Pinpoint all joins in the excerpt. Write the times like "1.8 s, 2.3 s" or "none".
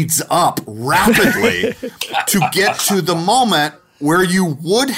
3.8 s